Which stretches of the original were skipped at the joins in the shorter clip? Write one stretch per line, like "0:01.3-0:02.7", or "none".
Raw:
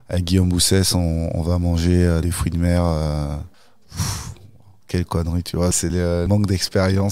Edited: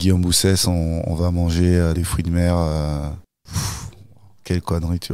0:03.6-0:03.8